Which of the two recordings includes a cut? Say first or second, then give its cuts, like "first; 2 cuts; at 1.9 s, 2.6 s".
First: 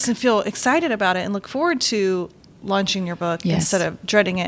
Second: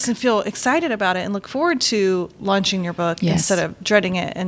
second; 1 cut; at 2.3 s